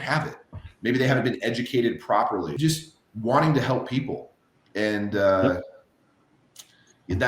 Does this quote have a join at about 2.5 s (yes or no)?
yes